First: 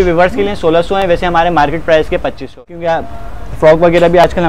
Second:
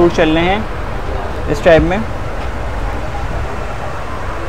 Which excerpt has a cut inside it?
first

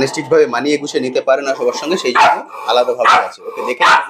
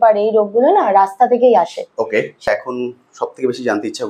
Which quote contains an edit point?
second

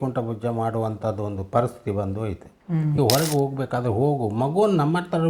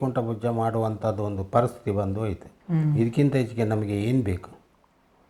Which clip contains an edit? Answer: first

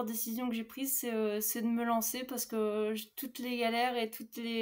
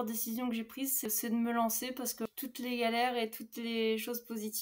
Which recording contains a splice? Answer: second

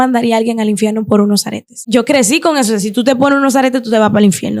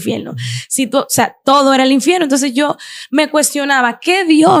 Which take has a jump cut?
first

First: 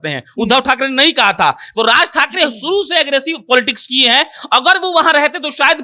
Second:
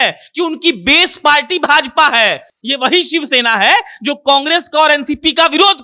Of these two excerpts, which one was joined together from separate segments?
second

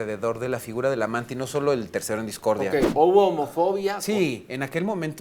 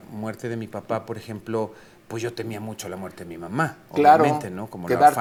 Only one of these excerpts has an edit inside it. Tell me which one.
first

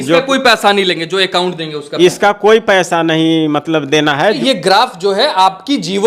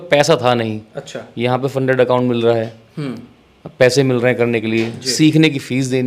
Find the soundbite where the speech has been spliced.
first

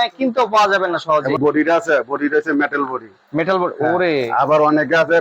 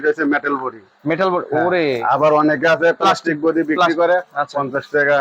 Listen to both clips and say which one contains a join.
first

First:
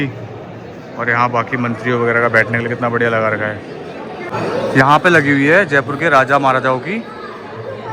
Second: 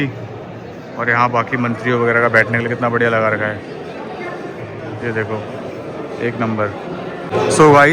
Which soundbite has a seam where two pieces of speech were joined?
first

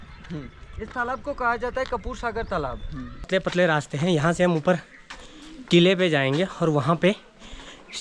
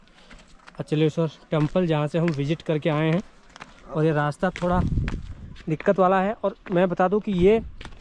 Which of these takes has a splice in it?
first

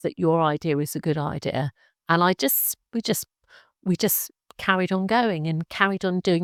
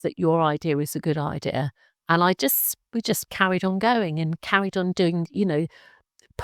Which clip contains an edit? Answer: second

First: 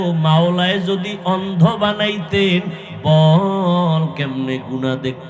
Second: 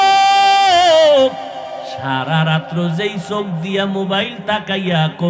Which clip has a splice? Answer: second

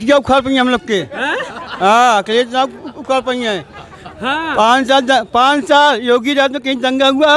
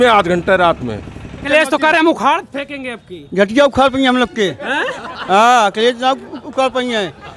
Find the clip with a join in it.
second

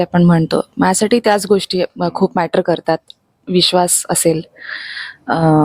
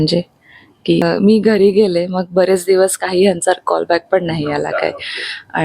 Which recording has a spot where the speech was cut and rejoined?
second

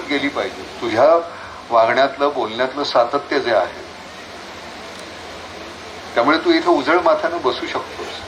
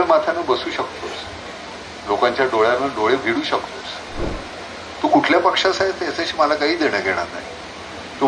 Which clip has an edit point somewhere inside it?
second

